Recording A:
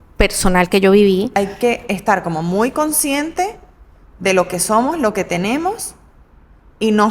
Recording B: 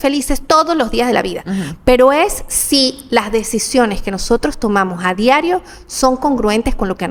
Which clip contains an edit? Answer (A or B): A